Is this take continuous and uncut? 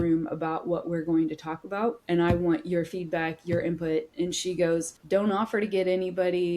no; 2 cuts; at 2.0 s, 4.9 s

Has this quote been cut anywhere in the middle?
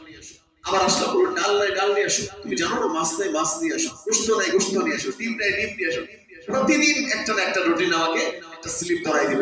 no; 0 cuts

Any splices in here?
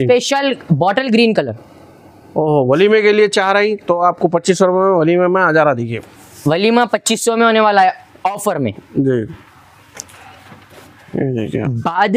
no; 0 cuts

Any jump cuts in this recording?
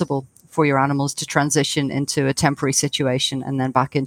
no; 0 cuts

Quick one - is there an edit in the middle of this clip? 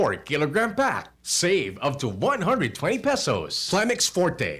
yes; 1 cut; at 3.7 s

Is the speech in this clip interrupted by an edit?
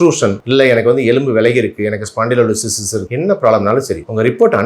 yes; 1 cut; at 3.1 s

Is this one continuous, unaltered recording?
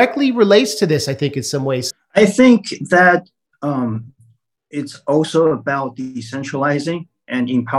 no; 1 cut; at 1.9 s

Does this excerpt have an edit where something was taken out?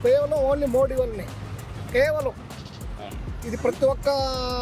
no; 0 cuts

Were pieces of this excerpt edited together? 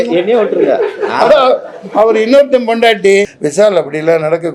yes; 1 cut; at 3.3 s

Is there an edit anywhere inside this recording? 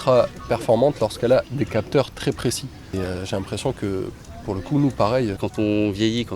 yes; 2 cuts; at 2.9 s, 5.4 s

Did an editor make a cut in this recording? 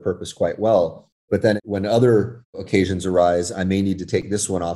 yes; 2 cuts; at 1.4 s, 2.6 s

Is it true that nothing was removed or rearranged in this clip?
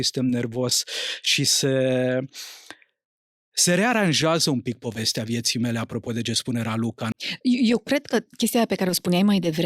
no; 1 cut; at 7.1 s

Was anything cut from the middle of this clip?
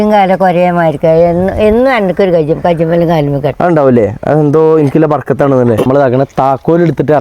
yes; 1 cut; at 5.9 s

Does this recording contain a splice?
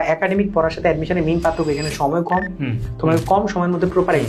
no; 0 cuts

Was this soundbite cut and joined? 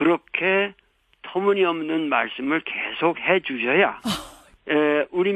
no; 0 cuts

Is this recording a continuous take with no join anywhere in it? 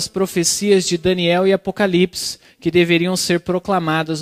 yes; 0 cuts

